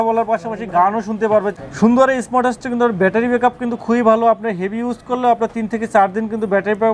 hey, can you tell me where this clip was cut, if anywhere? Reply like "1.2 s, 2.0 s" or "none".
1.5 s